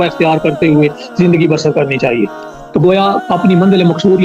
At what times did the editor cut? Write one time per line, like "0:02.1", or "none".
0:02.4